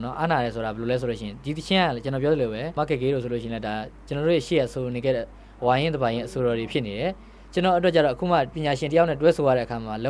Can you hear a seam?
yes; 2 cuts; at 2.7 s, 8.5 s

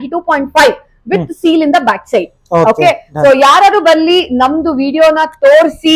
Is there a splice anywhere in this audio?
no; 0 cuts

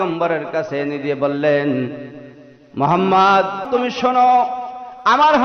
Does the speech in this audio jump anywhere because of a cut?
yes; 1 cut; at 3.7 s

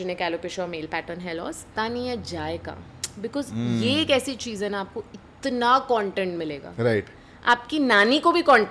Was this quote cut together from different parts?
yes; 1 cut; at 1.7 s

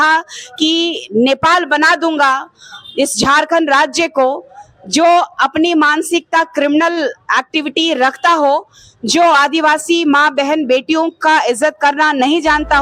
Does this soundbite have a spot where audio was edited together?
no; 0 cuts

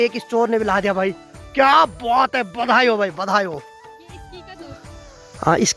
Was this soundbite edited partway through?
no; 0 cuts

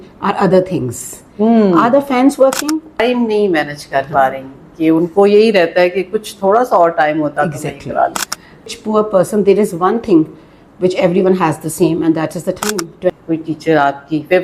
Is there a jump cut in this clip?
yes; 3 cuts; at 3.0 s, 8.7 s, 13.1 s

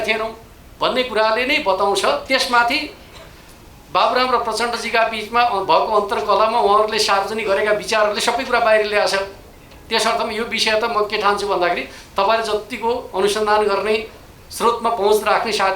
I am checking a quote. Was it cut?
no; 0 cuts

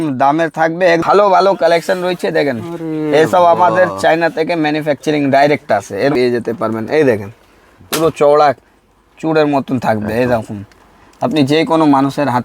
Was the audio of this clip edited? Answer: yes; 2 cuts; at 1.0 s, 6.1 s

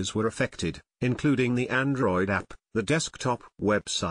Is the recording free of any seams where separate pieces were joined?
no; 1 cut; at 2.5 s

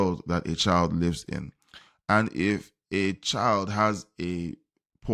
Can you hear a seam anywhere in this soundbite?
no; 0 cuts

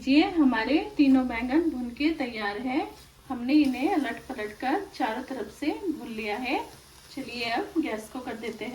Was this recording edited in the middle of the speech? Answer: no; 0 cuts

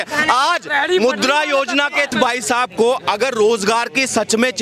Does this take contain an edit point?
yes; 1 cut; at 2.1 s

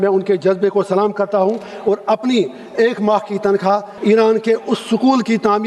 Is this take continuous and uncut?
no; 1 cut; at 3.9 s

